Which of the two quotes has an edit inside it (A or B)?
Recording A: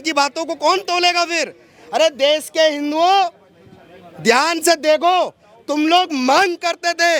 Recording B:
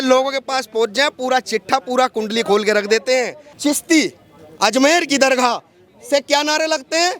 B